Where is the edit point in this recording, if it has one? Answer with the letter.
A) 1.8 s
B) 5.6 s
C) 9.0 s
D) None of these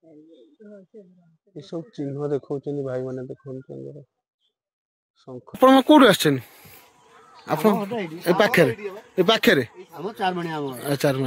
B